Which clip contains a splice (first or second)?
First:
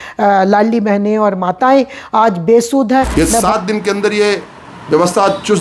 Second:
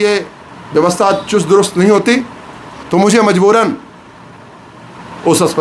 first